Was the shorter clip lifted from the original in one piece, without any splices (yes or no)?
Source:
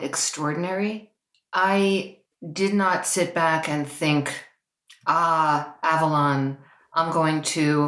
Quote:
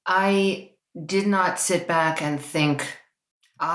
yes